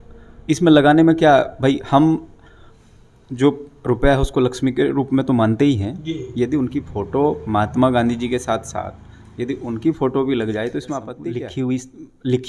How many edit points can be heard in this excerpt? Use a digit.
1